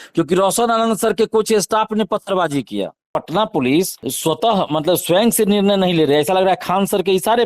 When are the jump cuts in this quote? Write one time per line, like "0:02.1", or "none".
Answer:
0:03.1
0:04.0